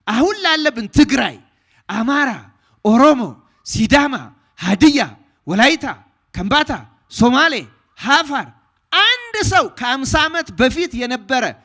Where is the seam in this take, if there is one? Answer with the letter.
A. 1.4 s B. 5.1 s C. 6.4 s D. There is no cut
D